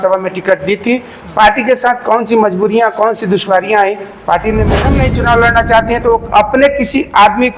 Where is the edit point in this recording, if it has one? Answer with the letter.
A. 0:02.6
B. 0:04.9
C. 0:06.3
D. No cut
B